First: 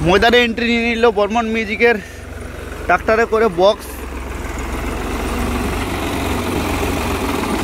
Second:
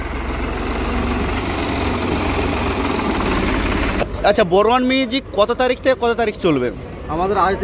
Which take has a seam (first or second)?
second